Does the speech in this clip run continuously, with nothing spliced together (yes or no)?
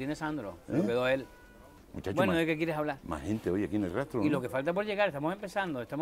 no